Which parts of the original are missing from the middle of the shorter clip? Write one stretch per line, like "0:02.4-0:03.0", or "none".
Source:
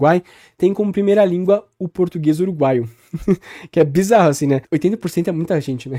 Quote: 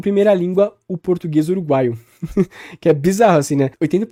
none